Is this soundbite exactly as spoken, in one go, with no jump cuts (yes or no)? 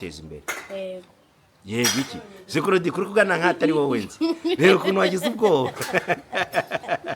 yes